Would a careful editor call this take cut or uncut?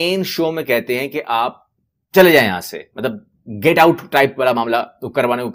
uncut